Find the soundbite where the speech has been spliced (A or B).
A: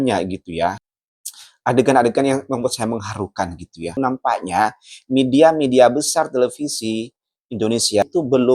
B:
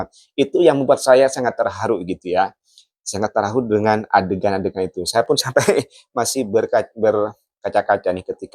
A